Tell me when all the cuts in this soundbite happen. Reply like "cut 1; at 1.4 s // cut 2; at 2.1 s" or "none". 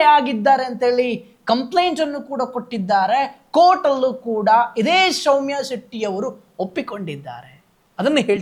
none